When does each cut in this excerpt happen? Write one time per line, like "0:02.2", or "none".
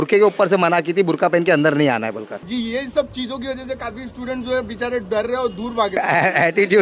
0:02.5
0:06.0